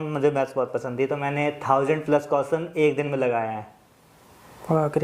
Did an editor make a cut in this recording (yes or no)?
no